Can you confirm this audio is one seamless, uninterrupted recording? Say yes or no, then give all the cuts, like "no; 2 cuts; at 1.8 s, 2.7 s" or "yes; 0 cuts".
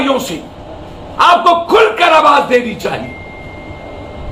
yes; 0 cuts